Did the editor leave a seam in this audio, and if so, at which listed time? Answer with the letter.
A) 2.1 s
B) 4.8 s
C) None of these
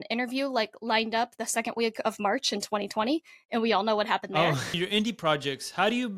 B